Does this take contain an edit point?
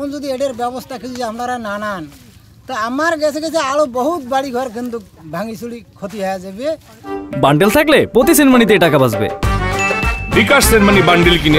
no; 0 cuts

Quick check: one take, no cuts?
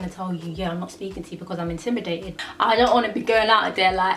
no; 1 cut; at 2.3 s

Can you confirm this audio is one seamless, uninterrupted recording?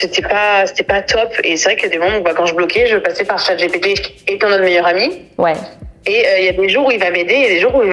yes; 0 cuts

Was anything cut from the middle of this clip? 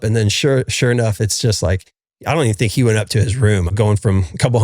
yes; 1 cut; at 3.7 s

